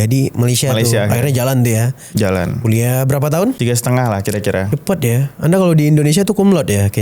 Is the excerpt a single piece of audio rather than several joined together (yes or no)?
no